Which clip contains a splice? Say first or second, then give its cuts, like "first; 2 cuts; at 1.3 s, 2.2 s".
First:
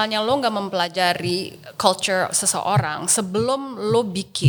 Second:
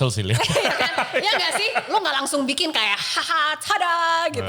second; 1 cut; at 1.9 s